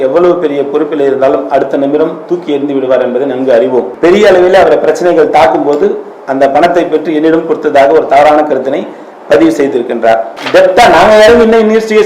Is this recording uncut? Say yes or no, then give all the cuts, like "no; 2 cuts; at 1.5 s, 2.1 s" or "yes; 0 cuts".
no; 2 cuts; at 3.9 s, 10.3 s